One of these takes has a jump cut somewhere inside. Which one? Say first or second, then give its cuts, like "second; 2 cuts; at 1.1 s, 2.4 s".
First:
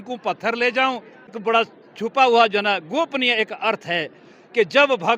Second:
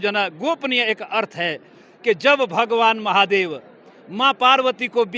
first; 1 cut; at 1.4 s